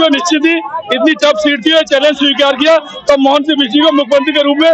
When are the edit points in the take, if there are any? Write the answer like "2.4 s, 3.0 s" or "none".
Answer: none